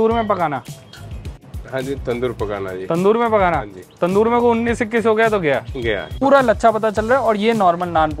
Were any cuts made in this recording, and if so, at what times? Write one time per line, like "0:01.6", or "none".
0:06.1